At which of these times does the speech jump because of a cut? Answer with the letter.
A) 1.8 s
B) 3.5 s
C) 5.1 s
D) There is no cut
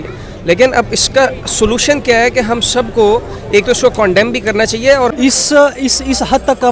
C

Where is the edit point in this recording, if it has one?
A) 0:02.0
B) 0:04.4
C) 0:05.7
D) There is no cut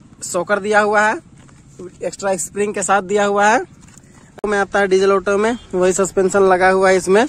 B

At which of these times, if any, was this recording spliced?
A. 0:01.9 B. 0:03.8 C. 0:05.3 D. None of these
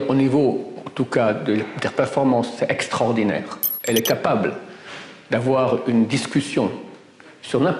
B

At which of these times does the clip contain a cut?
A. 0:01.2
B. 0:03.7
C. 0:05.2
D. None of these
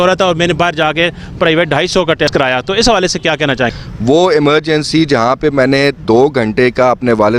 B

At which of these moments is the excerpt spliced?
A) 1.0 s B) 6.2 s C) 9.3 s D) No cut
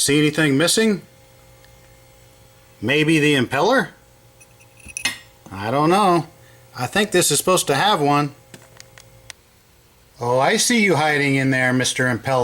C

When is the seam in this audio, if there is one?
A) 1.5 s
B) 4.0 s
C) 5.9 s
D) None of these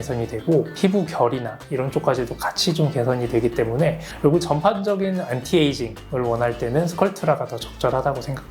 D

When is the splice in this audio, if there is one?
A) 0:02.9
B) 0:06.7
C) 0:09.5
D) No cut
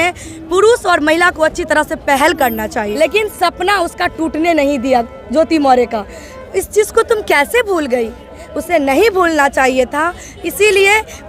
A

